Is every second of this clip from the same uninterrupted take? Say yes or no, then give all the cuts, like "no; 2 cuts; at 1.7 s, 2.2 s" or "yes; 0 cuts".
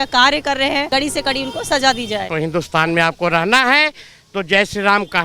no; 2 cuts; at 0.9 s, 2.3 s